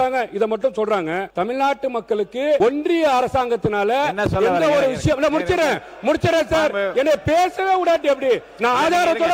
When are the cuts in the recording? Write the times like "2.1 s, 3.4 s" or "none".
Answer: 1.3 s, 2.6 s